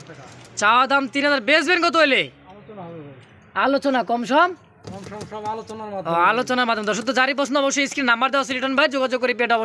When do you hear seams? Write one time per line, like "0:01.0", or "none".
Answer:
none

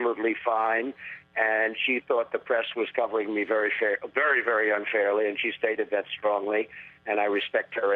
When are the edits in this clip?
0:06.5

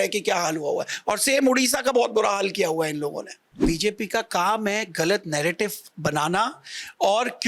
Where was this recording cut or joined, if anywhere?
0:03.4

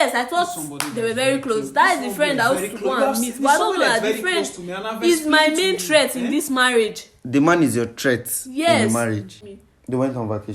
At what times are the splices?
0:09.3

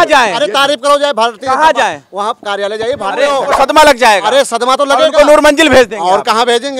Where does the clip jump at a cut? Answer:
0:03.3

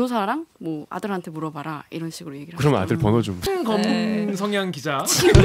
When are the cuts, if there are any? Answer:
0:03.4

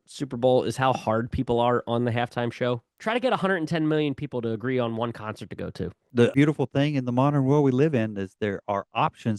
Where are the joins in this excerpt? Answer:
0:02.9
0:06.3

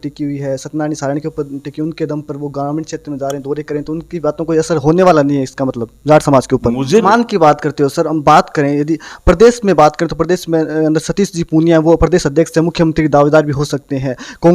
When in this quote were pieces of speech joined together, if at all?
0:07.0

